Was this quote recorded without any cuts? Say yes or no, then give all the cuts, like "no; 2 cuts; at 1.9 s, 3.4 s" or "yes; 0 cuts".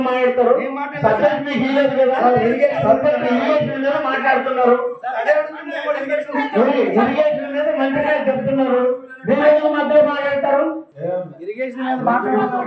no; 1 cut; at 10.9 s